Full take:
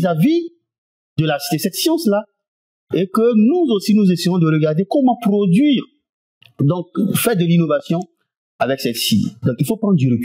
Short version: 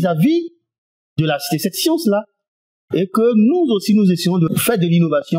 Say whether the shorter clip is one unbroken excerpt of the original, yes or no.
no